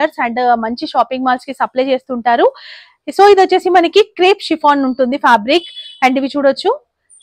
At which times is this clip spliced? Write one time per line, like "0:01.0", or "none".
none